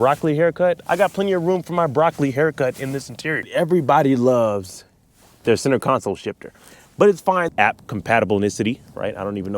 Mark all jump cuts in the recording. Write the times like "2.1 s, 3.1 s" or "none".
0.8 s, 3.4 s, 7.5 s